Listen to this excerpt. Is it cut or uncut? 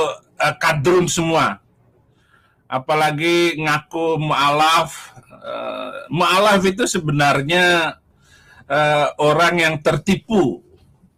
uncut